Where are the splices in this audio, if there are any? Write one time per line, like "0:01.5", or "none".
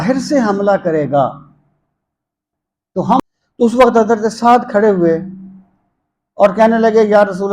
0:03.2